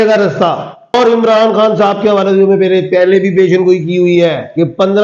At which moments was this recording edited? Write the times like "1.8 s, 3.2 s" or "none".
0.9 s